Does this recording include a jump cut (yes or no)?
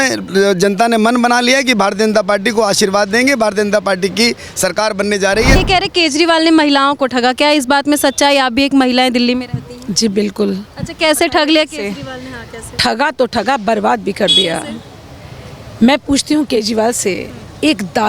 yes